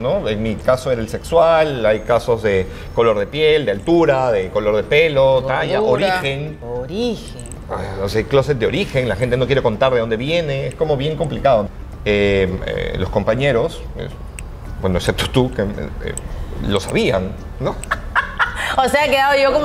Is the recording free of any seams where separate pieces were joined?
no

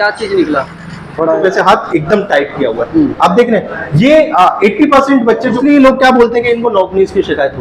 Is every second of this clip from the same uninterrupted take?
no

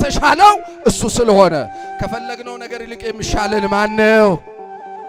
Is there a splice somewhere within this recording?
no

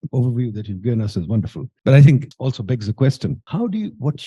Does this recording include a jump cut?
yes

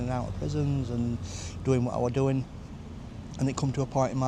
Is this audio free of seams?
yes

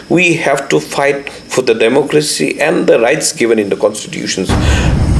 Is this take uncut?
yes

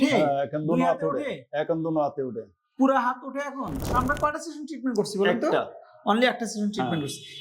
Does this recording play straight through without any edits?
no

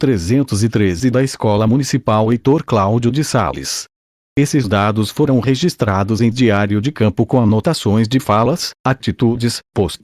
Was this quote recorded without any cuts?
no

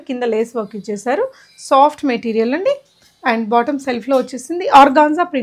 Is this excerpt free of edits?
yes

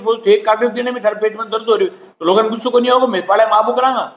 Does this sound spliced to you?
no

